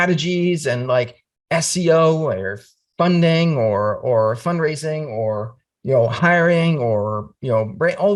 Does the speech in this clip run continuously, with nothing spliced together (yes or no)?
yes